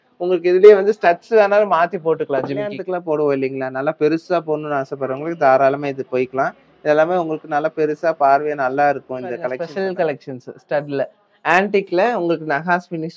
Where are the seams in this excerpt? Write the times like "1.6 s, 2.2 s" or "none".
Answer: 2.9 s, 9.6 s